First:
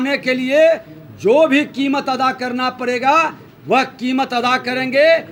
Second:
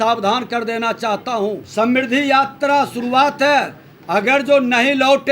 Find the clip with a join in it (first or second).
second